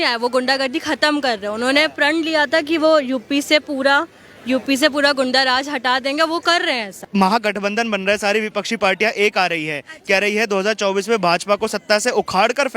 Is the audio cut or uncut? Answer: cut